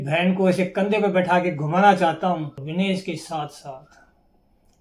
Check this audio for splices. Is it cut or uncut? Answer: cut